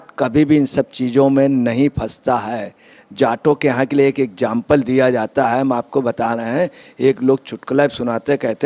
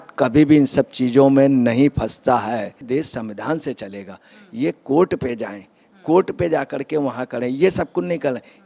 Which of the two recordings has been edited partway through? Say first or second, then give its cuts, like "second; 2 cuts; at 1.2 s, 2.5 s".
second; 1 cut; at 2.8 s